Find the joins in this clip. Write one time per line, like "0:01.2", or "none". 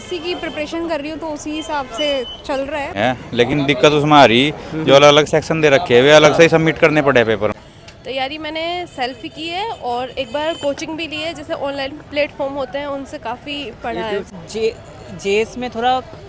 0:02.9
0:07.6
0:14.3